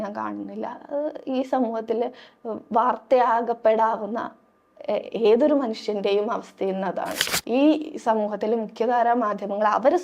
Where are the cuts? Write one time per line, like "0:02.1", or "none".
0:07.3